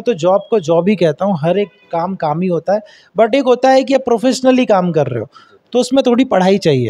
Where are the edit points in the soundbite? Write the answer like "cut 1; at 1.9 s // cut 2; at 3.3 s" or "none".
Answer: none

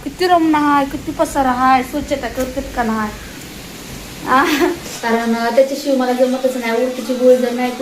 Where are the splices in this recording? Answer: cut 1; at 4.9 s

